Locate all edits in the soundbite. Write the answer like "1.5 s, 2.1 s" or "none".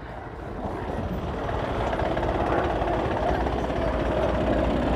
none